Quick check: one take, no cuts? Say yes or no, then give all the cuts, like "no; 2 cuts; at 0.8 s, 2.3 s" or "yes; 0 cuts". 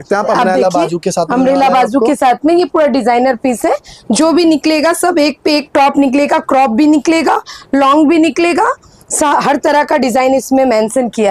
yes; 0 cuts